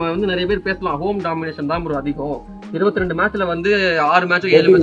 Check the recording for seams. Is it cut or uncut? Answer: uncut